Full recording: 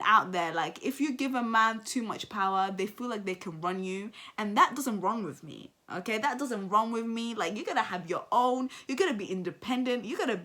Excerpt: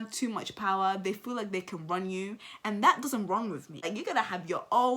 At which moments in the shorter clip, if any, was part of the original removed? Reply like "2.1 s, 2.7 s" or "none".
3.8 s